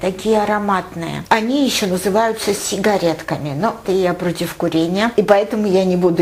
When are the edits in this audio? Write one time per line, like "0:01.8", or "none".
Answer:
0:01.2
0:03.8

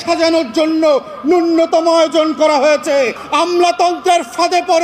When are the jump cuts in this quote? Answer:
0:03.2

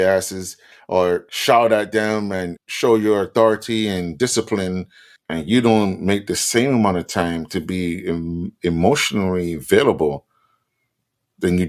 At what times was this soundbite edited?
none

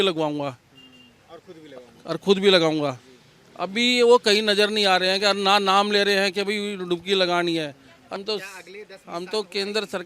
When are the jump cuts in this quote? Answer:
0:08.2

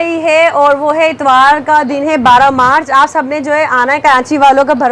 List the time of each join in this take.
none

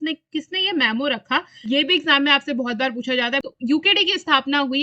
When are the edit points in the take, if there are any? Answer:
0:01.6
0:03.4

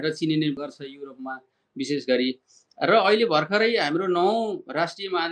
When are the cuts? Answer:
none

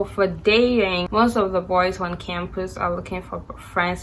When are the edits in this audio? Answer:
0:01.1

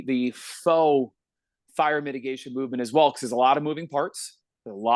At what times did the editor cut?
none

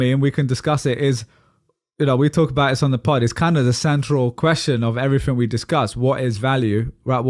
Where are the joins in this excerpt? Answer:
none

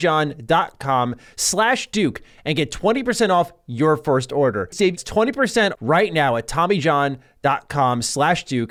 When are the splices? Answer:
none

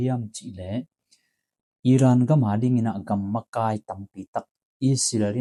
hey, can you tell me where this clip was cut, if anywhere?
none

